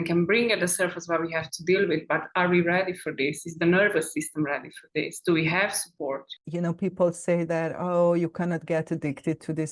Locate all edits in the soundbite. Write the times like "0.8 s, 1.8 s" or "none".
6.3 s

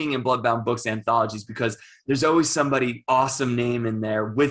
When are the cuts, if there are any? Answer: none

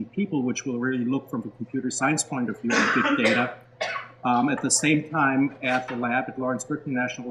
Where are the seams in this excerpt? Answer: none

